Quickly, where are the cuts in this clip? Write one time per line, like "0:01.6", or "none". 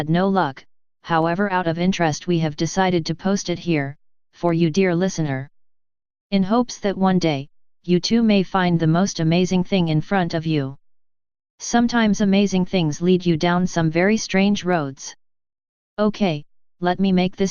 0:01.8